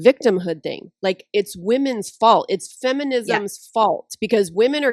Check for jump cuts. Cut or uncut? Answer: uncut